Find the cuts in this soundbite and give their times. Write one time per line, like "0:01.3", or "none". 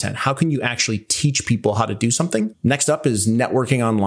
0:02.5